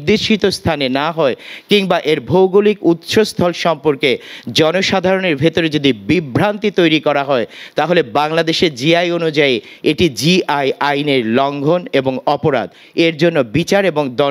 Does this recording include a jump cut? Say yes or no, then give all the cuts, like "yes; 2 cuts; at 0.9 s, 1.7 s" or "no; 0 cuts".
no; 0 cuts